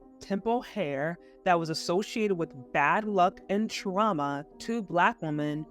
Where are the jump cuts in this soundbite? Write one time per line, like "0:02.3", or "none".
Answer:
0:04.5